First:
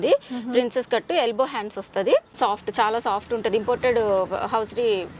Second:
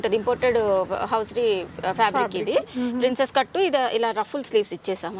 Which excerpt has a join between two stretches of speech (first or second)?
first